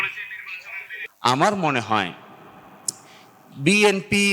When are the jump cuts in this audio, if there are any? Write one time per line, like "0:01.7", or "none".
0:00.9